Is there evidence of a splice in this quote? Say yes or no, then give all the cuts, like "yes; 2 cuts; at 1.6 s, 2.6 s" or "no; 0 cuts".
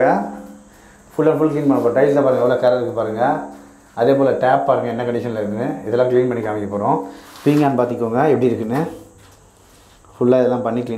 no; 0 cuts